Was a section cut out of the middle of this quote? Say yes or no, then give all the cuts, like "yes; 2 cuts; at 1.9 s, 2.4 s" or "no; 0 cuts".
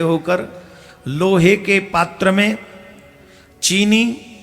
no; 0 cuts